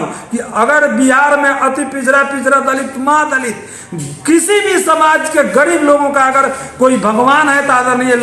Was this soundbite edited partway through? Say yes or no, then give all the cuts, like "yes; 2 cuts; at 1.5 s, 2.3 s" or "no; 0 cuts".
no; 0 cuts